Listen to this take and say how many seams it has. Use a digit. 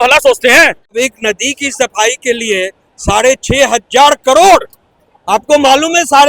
1